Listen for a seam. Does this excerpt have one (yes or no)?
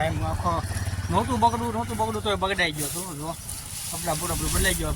no